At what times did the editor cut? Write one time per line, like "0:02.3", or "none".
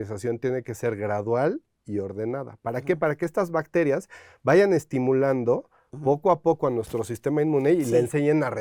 none